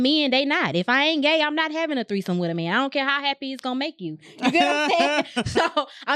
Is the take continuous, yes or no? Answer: yes